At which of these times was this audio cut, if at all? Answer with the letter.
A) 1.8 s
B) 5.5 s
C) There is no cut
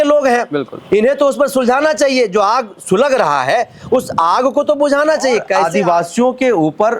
B